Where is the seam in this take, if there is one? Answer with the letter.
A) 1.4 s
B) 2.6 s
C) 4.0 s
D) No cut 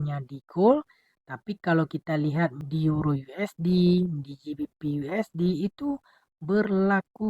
B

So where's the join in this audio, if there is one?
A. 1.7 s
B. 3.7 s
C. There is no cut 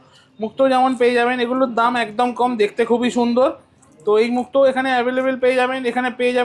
C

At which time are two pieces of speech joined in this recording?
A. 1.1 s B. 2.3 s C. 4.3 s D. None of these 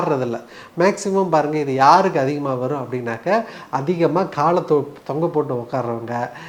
D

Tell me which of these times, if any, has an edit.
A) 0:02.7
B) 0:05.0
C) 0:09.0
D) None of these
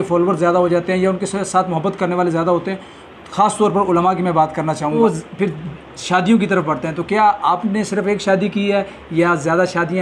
B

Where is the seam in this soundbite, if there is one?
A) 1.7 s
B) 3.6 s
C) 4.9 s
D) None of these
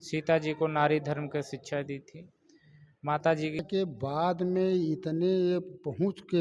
B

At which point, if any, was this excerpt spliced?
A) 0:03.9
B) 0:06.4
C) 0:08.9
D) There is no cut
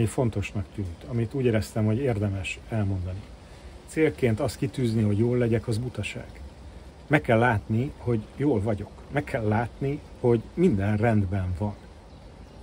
A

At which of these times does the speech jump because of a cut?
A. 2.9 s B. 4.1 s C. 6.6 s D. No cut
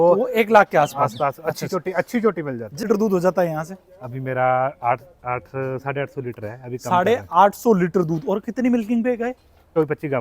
A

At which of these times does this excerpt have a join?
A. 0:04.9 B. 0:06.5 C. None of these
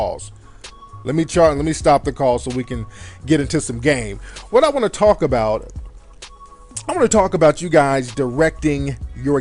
A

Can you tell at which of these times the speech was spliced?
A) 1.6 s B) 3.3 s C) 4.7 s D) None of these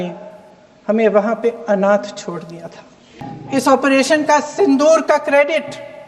B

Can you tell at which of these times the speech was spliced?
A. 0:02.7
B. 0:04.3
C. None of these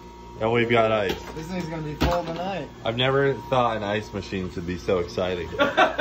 A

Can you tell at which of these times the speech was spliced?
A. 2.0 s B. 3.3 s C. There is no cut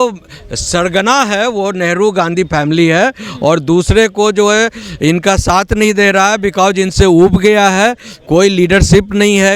C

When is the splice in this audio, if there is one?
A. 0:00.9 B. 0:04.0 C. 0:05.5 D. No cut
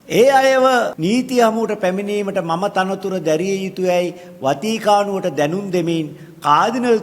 A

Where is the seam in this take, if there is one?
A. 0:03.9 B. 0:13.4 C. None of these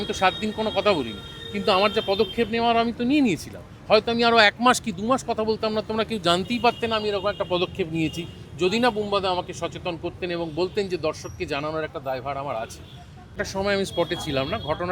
B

